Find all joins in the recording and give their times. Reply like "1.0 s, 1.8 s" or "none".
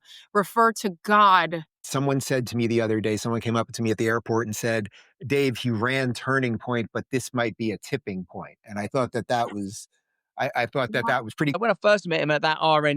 1.8 s, 11.6 s